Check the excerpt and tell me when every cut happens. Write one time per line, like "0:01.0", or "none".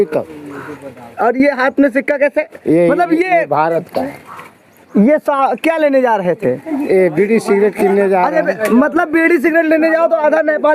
none